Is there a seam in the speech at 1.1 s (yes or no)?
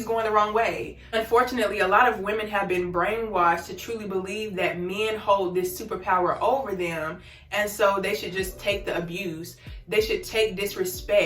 yes